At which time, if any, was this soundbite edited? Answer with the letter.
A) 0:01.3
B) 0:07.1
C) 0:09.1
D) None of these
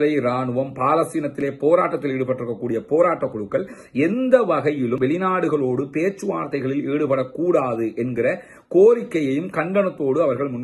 D